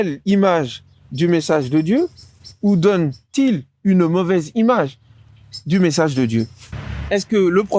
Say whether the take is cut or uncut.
cut